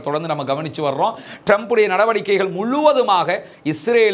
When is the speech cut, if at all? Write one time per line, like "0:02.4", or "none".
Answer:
none